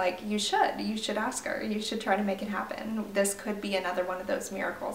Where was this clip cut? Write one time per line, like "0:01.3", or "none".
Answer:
none

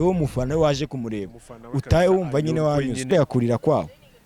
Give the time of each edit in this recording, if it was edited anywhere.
0:03.1

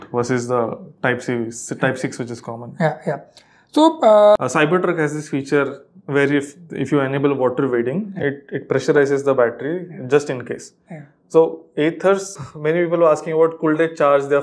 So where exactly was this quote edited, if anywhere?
0:04.4
0:12.3

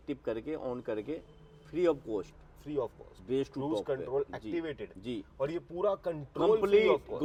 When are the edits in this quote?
none

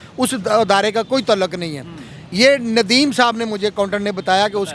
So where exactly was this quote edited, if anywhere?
none

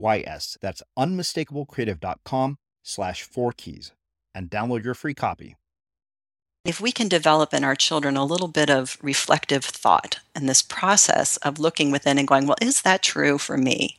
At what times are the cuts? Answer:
0:06.6

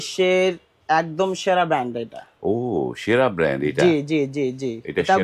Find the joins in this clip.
none

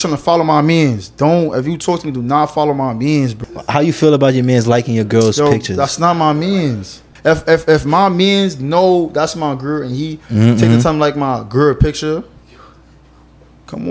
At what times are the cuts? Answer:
0:03.4
0:07.0

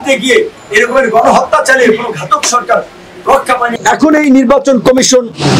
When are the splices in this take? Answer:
0:03.7

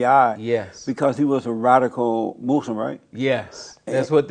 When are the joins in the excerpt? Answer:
none

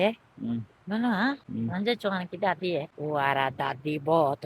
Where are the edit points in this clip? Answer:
0:01.5
0:02.9

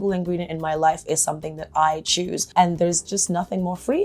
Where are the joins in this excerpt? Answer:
0:02.4
0:03.1

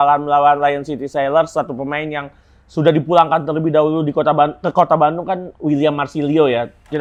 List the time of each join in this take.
none

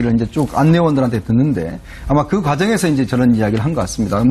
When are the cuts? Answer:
none

